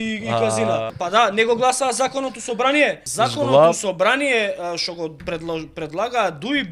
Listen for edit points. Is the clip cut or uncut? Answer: cut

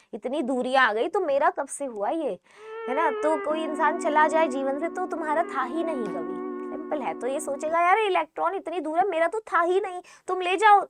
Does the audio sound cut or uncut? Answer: uncut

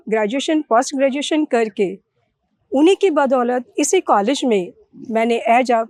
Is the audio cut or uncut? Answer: uncut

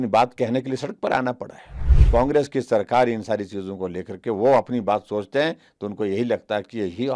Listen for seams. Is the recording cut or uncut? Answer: cut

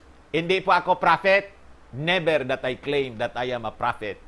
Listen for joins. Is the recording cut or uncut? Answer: uncut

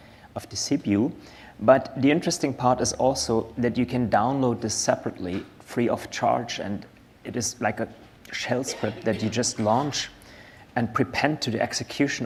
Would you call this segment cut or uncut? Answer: uncut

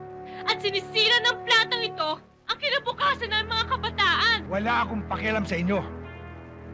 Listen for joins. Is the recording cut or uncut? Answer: cut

